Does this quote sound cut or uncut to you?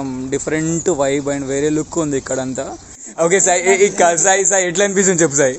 cut